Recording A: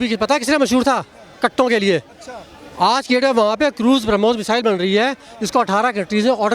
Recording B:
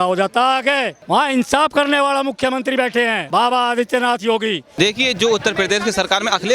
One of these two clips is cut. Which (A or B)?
B